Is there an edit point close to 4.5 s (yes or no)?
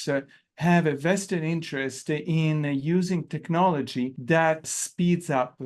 yes